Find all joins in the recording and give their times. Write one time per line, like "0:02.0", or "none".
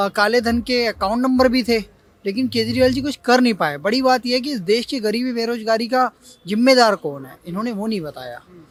none